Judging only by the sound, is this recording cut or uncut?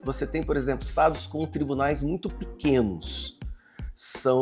uncut